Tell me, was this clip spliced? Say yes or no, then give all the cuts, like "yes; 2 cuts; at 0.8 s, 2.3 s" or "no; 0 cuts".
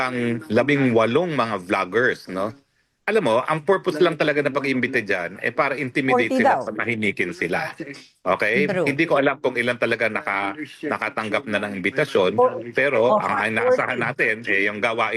no; 0 cuts